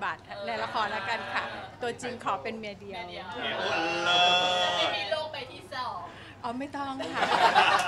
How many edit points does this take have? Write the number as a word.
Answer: zero